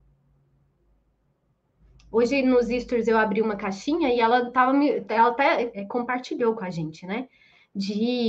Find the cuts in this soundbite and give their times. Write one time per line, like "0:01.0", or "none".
0:05.8

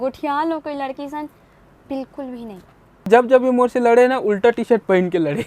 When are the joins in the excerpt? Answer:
0:03.1

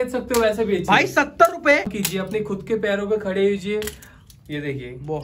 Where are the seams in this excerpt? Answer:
0:01.9

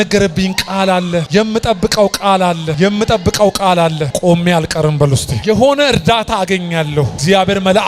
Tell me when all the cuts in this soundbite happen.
none

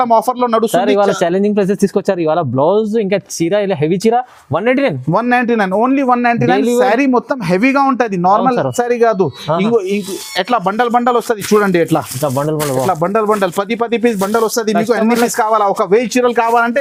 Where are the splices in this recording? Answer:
none

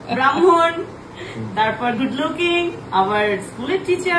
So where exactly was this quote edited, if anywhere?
none

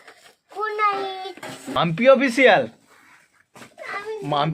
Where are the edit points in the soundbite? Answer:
0:01.8

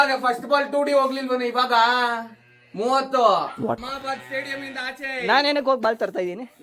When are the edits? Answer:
0:03.7

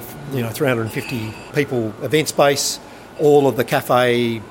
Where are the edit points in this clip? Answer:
0:01.4
0:03.1

